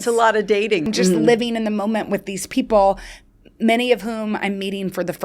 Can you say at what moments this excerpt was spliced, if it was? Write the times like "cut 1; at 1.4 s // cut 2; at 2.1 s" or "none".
cut 1; at 0.9 s